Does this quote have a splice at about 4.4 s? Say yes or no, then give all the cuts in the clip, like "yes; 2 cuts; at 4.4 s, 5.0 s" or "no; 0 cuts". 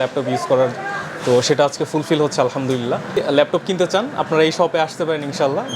no; 1 cut; at 3.1 s